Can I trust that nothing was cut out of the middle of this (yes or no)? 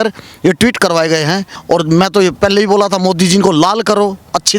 no